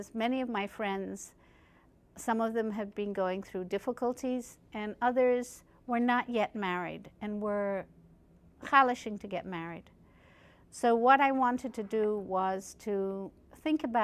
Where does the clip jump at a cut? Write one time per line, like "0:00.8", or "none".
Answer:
none